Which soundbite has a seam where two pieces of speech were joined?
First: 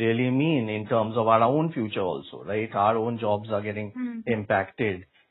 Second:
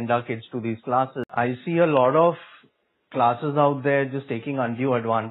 second; 1 cut; at 1.2 s

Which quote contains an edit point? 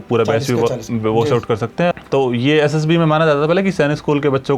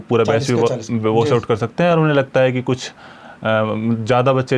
first; 1 cut; at 1.9 s

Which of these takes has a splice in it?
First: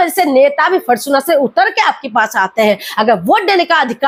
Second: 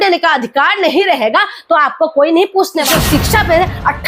second; 1 cut; at 2.9 s

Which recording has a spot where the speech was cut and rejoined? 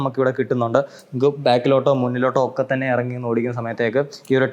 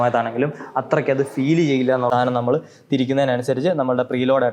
second; 1 cut; at 2.1 s

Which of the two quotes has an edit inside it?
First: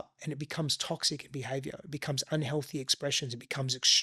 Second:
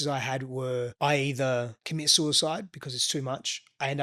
second; 2 cuts; at 0.9 s, 1.8 s

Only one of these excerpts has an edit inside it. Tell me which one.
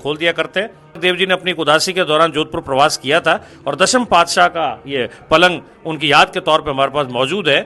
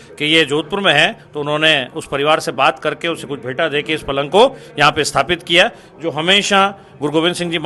first; 1 cut; at 1.0 s

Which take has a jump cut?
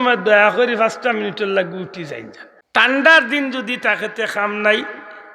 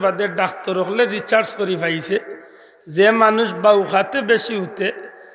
first; 1 cut; at 2.9 s

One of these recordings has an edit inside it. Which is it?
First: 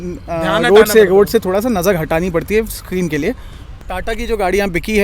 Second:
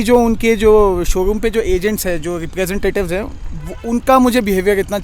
first; 1 cut; at 3.8 s

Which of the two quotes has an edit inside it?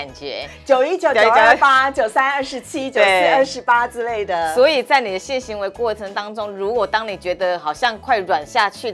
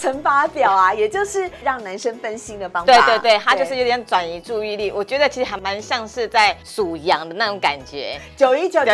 second; 3 cuts; at 1.6 s, 5.5 s, 6.6 s

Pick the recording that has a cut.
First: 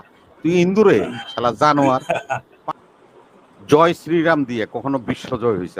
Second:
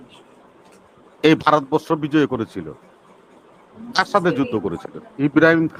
first; 1 cut; at 2.5 s

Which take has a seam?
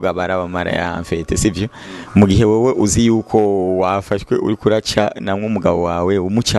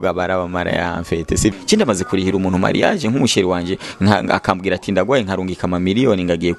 second; 1 cut; at 1.6 s

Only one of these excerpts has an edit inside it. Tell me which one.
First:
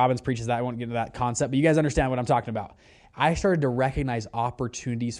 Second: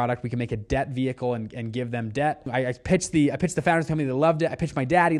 second; 1 cut; at 2.5 s

